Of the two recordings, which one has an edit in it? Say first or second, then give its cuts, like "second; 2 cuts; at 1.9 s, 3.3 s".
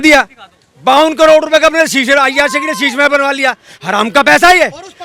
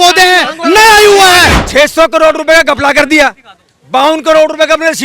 second; 1 cut; at 1.6 s